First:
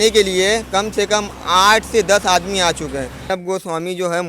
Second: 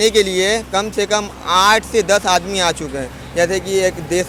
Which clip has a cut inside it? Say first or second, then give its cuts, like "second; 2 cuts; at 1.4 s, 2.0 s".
first; 1 cut; at 3.2 s